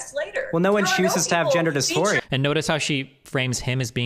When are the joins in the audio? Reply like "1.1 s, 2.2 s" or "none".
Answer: 2.2 s